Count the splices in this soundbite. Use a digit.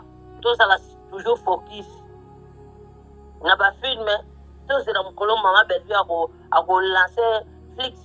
2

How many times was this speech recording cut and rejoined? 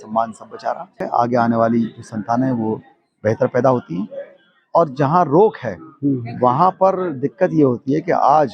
1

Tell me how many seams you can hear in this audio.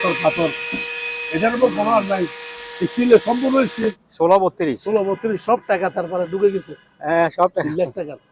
1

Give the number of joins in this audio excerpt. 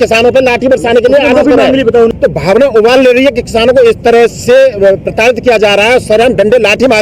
1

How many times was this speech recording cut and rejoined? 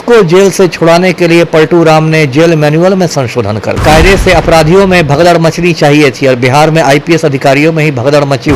1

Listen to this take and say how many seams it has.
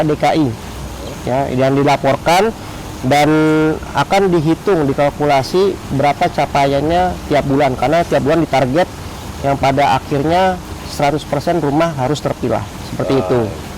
0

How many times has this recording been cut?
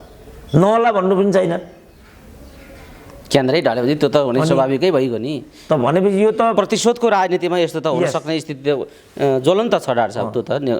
0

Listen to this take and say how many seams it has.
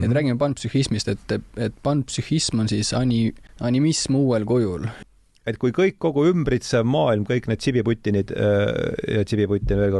2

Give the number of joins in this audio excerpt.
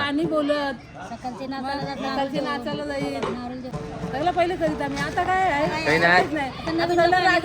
1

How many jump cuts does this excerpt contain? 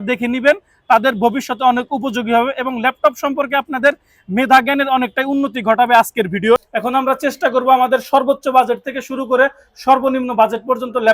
1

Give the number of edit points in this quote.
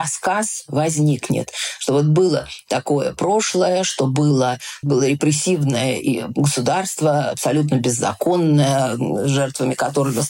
0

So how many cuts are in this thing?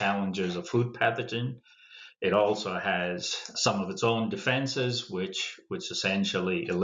1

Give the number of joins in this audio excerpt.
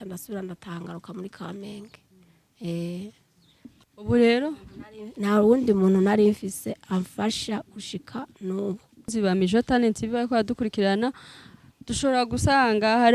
1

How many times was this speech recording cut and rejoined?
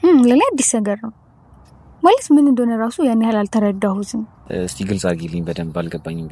1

